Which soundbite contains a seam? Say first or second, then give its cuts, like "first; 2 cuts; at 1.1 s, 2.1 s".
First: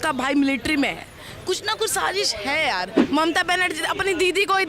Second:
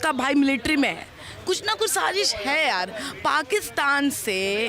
first; 1 cut; at 3.0 s